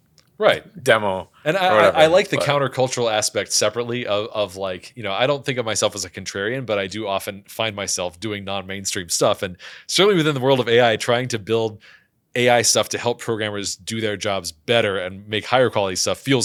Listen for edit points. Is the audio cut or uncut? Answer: uncut